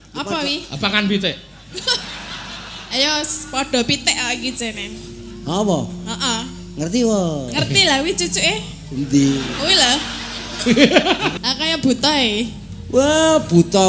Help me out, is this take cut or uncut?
cut